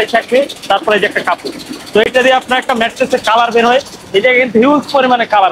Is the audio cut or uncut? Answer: uncut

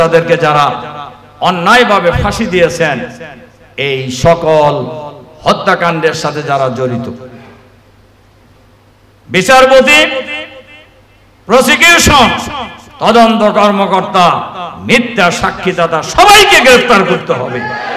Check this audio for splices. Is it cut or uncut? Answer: uncut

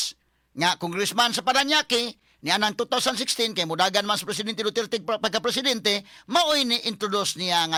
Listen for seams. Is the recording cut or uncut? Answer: uncut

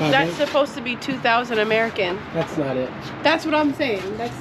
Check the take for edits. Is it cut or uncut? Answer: uncut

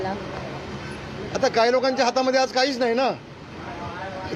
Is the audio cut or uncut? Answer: uncut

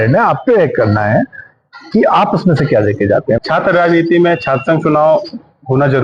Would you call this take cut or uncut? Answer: cut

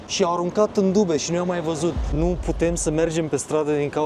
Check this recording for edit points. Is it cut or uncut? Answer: cut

